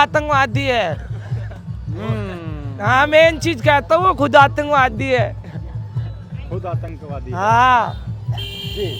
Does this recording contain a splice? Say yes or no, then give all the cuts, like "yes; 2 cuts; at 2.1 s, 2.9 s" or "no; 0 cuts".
no; 0 cuts